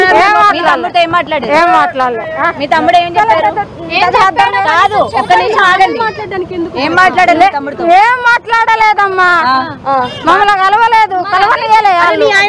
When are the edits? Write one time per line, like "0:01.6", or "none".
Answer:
none